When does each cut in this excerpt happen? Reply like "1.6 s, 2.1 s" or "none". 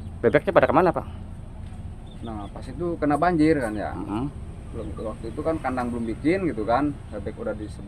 none